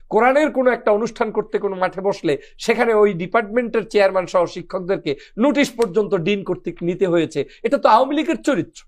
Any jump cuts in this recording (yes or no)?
no